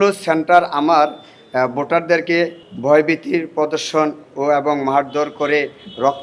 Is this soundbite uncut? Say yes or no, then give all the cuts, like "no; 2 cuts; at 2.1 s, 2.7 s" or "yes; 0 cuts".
yes; 0 cuts